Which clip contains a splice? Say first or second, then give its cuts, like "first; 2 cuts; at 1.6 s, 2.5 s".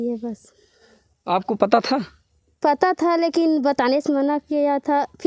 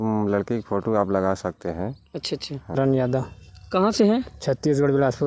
second; 1 cut; at 2.8 s